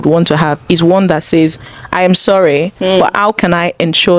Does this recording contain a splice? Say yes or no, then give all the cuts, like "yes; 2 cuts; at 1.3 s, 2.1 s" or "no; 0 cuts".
no; 0 cuts